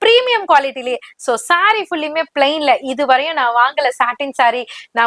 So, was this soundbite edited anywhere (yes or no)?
no